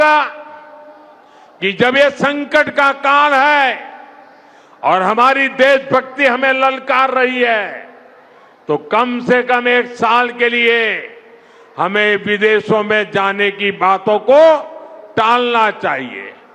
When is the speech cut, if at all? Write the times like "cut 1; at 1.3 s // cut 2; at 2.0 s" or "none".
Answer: none